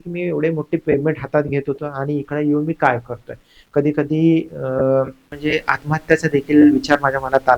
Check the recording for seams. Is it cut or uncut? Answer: cut